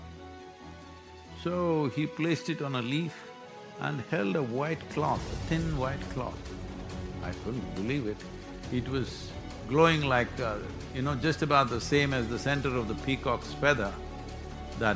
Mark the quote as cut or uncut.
uncut